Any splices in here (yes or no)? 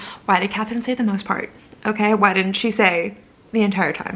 no